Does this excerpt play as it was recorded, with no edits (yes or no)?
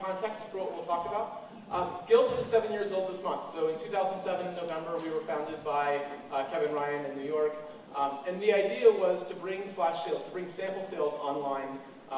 no